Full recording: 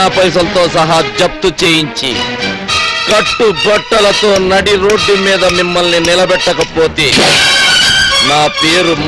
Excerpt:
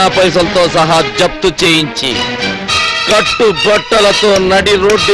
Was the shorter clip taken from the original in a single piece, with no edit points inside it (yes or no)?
yes